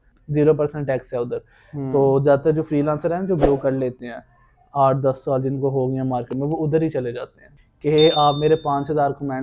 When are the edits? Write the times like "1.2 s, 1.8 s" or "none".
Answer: 7.5 s